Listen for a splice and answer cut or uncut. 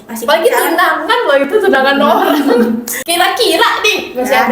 cut